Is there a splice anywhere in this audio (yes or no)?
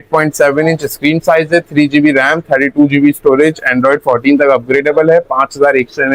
no